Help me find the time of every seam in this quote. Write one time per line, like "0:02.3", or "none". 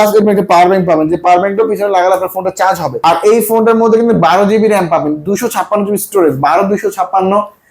0:03.0